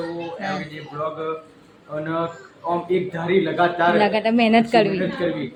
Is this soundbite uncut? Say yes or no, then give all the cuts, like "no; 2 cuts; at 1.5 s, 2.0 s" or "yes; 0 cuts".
yes; 0 cuts